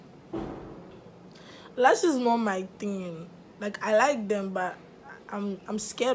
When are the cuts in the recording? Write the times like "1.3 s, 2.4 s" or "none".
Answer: none